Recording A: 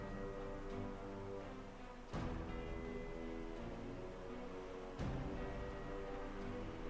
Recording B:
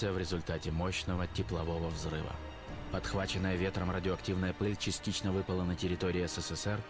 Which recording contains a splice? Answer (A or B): B